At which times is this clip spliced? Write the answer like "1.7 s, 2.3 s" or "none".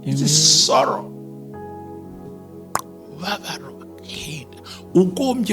1.0 s, 2.7 s